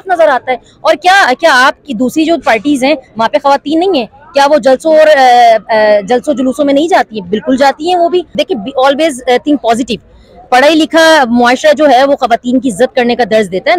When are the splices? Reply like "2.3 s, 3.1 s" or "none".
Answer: none

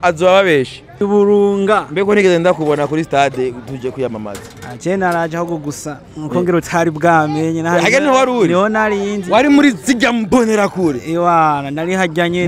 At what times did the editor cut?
1.0 s

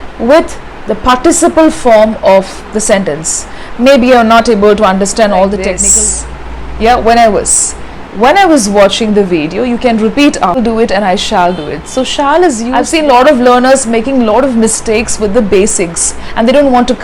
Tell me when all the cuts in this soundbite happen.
5.8 s, 10.6 s, 12.8 s

